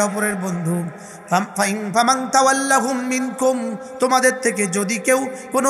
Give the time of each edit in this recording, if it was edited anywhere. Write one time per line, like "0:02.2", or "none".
none